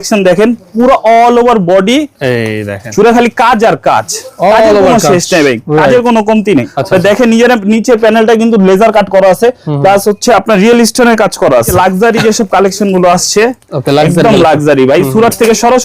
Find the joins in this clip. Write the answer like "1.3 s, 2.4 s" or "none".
6.8 s, 11.7 s